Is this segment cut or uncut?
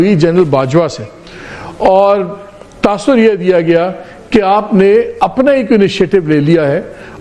uncut